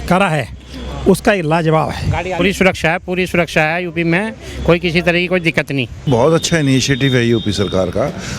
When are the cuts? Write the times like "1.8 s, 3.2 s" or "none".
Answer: 2.4 s, 6.1 s

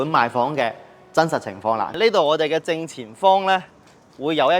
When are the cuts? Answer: 1.9 s

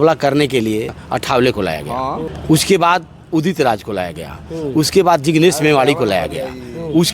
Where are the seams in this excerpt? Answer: 0.9 s, 2.2 s

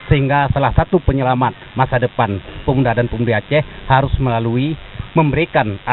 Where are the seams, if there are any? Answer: none

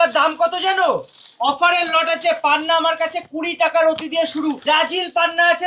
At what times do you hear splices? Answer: 4.6 s

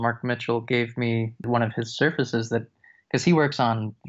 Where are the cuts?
none

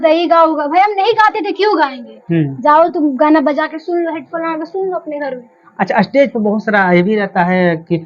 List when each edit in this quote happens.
none

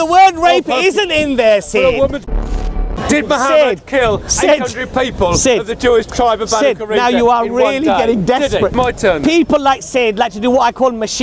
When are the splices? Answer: 2.7 s, 8.7 s

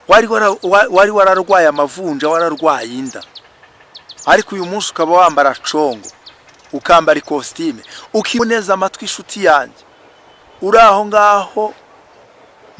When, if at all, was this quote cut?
8.4 s

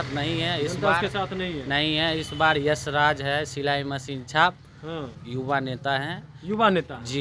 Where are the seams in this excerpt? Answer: 5.2 s

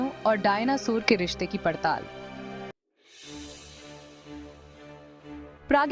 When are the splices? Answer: 2.7 s

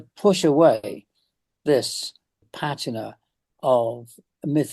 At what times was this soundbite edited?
2.4 s

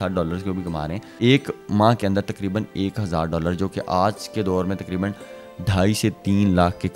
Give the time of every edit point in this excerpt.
1.1 s

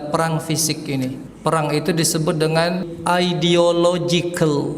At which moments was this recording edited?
1.3 s, 2.9 s

